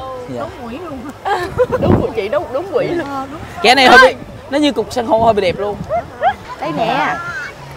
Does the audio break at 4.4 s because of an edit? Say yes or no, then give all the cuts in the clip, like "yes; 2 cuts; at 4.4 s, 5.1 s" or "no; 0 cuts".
no; 1 cut; at 6.4 s